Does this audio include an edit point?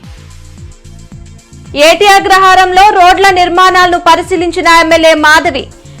yes; 1 cut; at 0.9 s

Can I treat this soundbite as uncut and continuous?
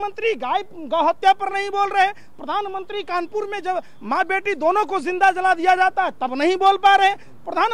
yes; 0 cuts

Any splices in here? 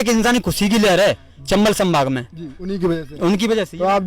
no; 0 cuts

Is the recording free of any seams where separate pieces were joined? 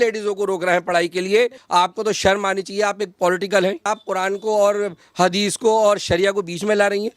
no; 2 cuts; at 1.6 s, 3.8 s

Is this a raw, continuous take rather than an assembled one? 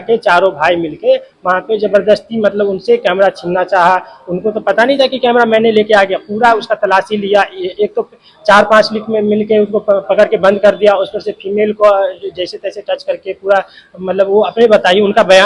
yes; 0 cuts

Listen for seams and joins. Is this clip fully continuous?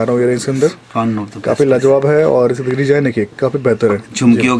yes; 0 cuts

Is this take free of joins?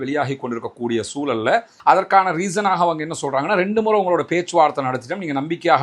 no; 1 cut; at 1.7 s

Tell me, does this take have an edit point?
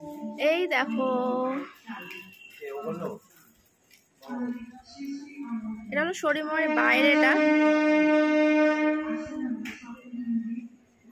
no; 0 cuts

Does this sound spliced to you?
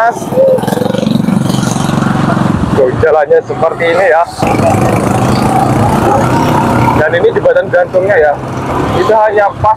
yes; 1 cut; at 4.4 s

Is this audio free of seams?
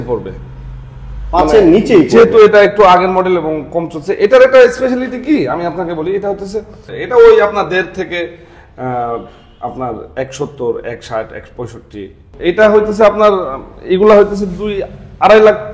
no; 2 cuts; at 6.9 s, 12.3 s

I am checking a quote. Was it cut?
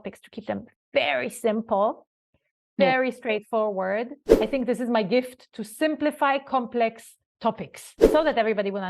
yes; 2 cuts; at 4.2 s, 7.9 s

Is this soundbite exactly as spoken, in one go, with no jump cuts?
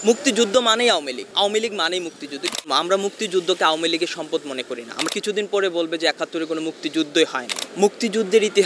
no; 4 cuts; at 1.2 s, 2.7 s, 5.0 s, 7.5 s

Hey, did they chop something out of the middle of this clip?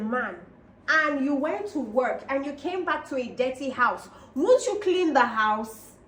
no; 0 cuts

